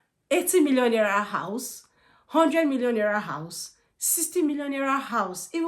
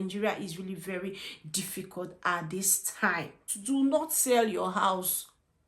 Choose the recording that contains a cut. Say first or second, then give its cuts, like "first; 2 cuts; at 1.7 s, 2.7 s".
second; 1 cut; at 3.5 s